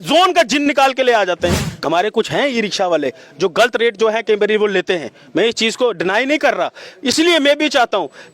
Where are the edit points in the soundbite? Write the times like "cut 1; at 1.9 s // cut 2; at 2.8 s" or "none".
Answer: cut 1; at 1.7 s

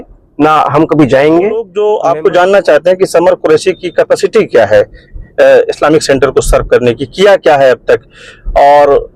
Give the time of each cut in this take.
cut 1; at 1.7 s

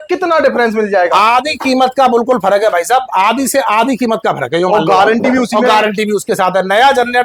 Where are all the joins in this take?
none

